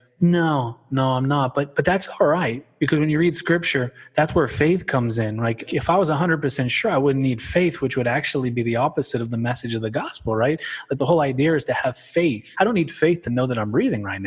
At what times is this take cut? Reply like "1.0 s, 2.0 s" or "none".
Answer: 2.6 s, 5.6 s, 12.4 s